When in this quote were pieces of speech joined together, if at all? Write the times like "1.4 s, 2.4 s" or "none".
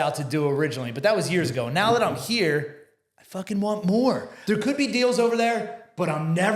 4.3 s